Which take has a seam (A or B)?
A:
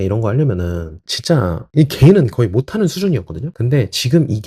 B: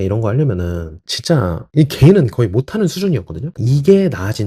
B